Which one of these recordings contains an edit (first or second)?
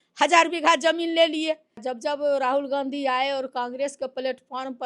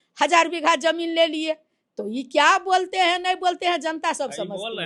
first